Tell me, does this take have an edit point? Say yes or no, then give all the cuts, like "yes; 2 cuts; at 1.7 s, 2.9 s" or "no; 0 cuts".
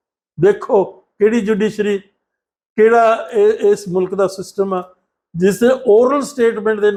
no; 0 cuts